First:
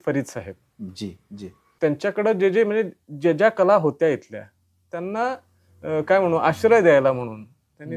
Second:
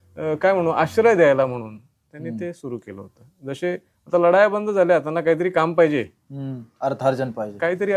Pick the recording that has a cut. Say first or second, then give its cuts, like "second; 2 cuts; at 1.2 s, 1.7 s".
first; 1 cut; at 1.6 s